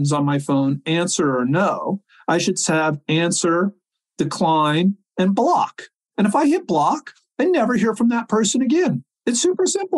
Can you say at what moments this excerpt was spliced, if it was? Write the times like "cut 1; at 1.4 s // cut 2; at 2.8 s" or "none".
cut 1; at 3.9 s // cut 2; at 9.1 s